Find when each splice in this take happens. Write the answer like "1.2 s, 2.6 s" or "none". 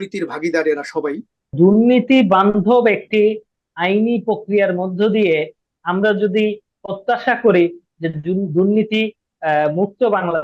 1.5 s